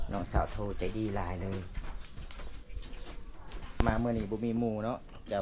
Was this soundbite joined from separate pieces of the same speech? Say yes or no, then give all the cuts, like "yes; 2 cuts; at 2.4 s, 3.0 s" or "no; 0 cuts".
yes; 1 cut; at 3.8 s